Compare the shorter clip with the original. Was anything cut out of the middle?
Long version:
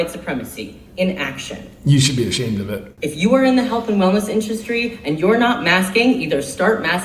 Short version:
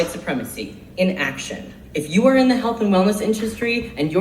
yes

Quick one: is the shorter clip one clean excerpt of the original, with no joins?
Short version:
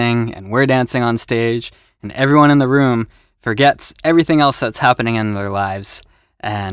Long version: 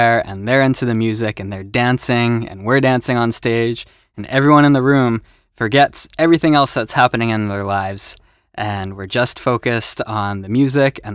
yes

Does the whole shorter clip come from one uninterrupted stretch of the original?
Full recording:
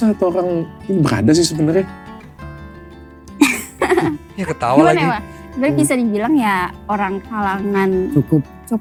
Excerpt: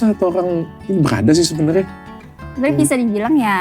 no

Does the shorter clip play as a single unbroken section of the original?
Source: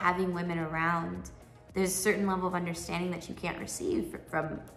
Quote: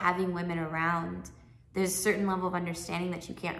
yes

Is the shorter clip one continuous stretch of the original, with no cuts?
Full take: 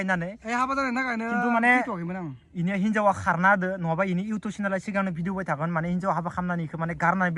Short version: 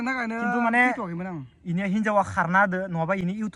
yes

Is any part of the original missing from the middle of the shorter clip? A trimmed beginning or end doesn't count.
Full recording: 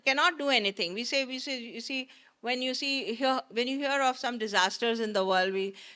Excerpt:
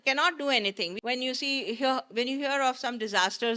yes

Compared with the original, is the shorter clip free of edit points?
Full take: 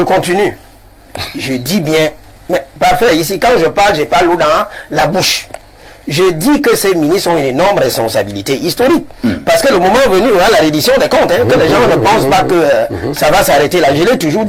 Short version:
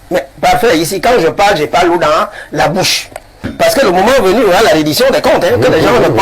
no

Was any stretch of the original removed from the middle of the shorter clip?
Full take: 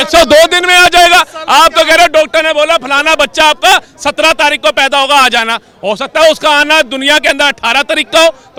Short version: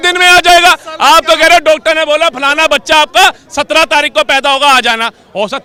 no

